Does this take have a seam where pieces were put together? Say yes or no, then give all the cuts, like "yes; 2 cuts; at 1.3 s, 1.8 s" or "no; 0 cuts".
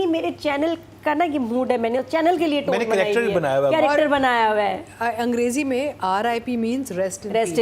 no; 0 cuts